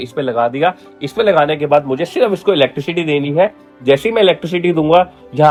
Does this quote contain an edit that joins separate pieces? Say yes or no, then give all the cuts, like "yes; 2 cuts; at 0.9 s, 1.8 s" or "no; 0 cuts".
no; 0 cuts